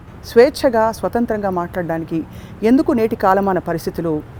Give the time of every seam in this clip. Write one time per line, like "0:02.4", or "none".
none